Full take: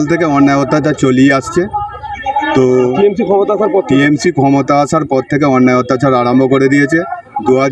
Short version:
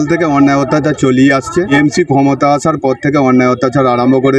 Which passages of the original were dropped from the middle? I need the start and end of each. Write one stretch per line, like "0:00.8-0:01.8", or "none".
0:01.7-0:04.0